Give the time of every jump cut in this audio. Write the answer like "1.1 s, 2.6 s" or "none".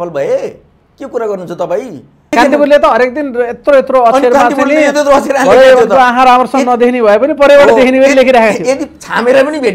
2.3 s